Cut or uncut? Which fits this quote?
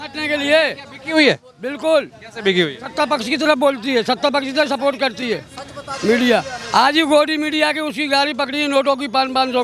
uncut